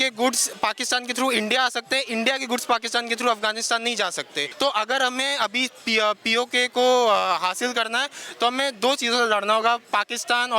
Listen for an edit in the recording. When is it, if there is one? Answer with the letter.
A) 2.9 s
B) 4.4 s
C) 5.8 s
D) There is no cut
B